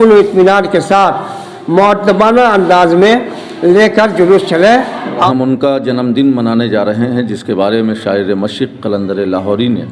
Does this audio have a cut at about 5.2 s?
yes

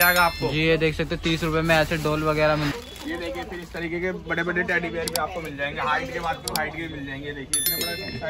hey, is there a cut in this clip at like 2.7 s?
yes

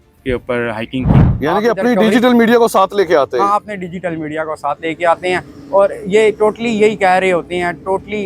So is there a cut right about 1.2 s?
yes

